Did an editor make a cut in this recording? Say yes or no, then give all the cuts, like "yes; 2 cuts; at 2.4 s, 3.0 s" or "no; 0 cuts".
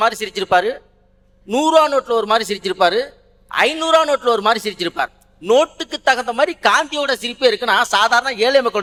no; 0 cuts